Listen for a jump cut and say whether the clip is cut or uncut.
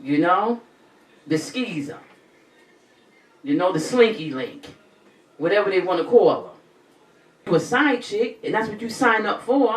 cut